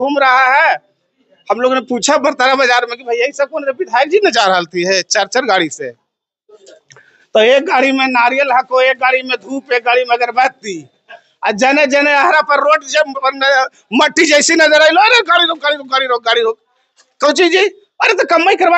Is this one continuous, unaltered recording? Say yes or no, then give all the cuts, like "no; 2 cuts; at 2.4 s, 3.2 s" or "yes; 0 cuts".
yes; 0 cuts